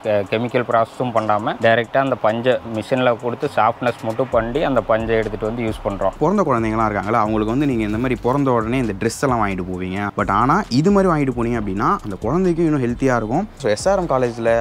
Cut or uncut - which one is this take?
cut